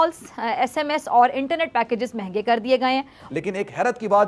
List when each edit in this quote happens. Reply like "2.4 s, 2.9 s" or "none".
3.3 s